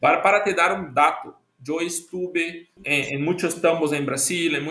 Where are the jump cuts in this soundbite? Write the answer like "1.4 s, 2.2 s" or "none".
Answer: 2.8 s